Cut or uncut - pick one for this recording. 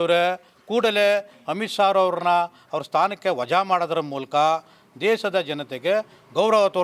uncut